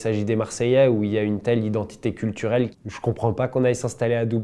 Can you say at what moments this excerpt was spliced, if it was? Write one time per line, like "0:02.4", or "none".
0:02.7